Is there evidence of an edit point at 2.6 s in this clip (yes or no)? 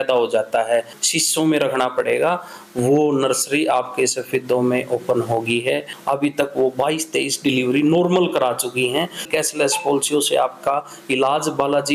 no